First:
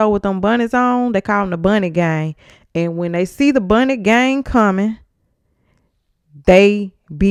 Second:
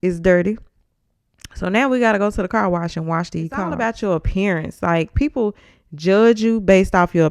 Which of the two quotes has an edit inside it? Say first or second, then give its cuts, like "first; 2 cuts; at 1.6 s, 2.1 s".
second; 1 cut; at 3.7 s